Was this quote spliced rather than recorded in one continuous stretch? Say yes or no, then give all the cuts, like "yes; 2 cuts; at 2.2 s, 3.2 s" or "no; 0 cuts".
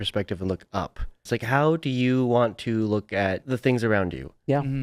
yes; 2 cuts; at 1.2 s, 3.5 s